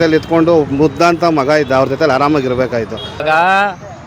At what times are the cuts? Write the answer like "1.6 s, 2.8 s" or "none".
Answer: 3.0 s